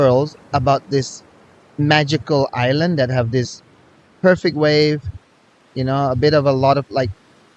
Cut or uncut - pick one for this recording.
uncut